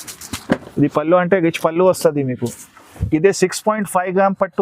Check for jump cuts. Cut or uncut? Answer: cut